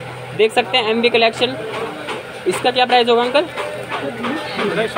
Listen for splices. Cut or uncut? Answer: uncut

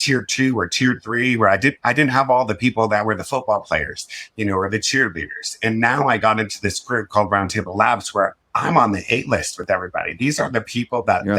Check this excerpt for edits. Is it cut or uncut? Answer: uncut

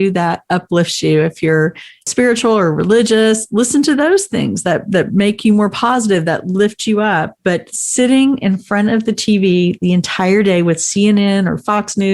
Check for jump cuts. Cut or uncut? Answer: cut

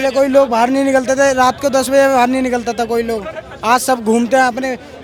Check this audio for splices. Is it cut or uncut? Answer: uncut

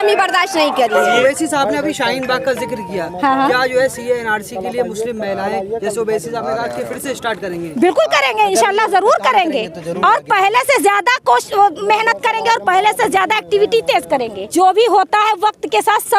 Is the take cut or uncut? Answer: cut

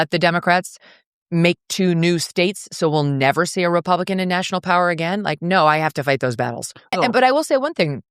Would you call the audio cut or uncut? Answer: cut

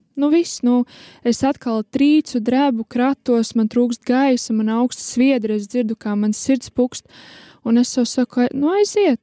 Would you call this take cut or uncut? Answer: uncut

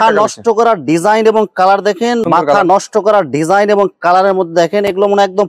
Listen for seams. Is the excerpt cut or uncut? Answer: cut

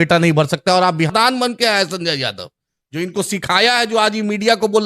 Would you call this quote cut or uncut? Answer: cut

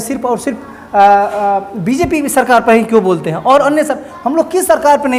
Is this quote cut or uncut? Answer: uncut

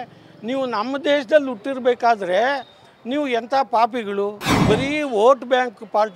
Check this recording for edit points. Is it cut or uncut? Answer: cut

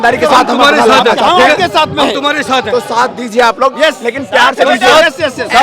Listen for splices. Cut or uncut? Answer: uncut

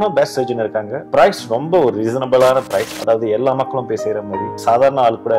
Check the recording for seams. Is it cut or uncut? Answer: cut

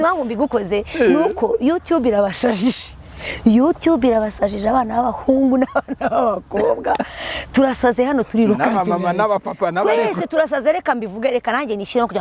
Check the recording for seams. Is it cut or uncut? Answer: uncut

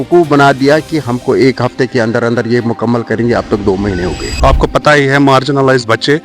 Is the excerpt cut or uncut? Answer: cut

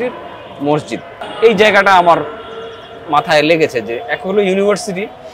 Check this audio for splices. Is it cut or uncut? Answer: cut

